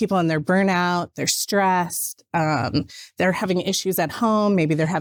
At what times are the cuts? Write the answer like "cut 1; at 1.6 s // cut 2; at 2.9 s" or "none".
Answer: none